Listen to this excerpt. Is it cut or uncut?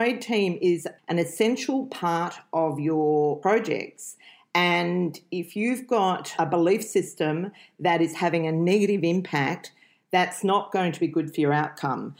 cut